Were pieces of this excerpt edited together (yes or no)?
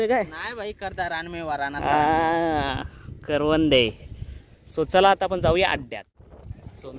no